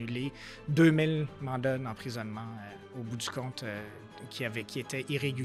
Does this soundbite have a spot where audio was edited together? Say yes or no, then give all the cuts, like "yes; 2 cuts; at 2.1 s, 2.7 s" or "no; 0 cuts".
no; 0 cuts